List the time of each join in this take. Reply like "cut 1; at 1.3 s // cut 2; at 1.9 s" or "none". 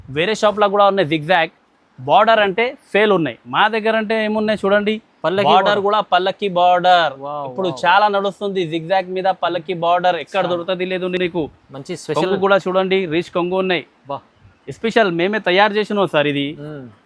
none